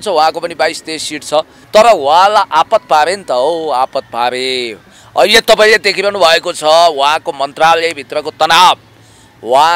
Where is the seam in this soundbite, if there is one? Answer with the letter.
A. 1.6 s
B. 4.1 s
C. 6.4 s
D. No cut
A